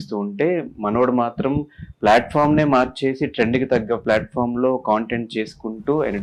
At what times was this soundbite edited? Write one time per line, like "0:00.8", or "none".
none